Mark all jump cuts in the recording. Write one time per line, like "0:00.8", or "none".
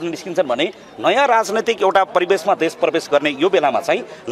none